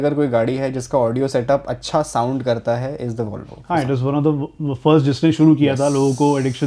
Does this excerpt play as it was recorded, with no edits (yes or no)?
yes